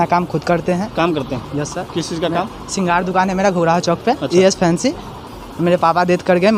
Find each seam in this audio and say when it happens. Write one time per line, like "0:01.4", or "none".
none